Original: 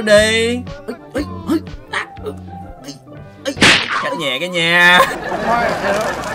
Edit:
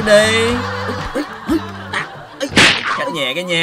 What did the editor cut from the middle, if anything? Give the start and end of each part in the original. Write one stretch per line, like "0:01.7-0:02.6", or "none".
0:02.1-0:03.2